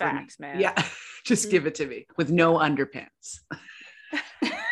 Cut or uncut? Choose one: uncut